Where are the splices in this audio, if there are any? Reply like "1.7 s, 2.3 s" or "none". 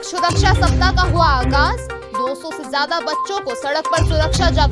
none

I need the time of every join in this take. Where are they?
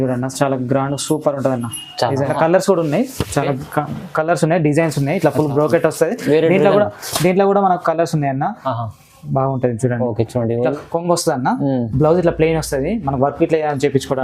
2.3 s, 10.7 s

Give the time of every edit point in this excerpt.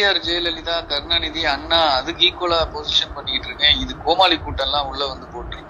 none

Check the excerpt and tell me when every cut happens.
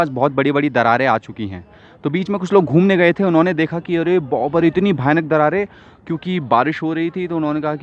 none

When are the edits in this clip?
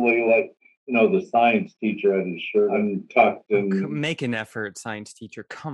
2.8 s, 3.9 s

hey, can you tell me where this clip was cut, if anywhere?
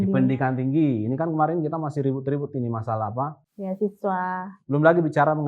4.5 s

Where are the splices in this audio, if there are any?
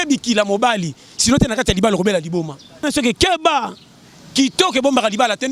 2.8 s

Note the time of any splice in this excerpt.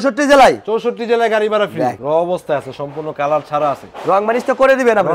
2.0 s

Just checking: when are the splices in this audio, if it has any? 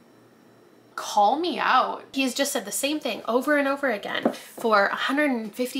2.1 s

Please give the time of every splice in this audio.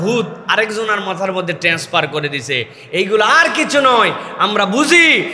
none

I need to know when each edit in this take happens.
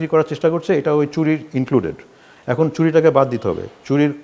none

